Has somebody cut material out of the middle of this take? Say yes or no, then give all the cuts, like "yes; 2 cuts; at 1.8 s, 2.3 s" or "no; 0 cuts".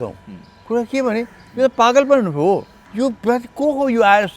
yes; 1 cut; at 2.8 s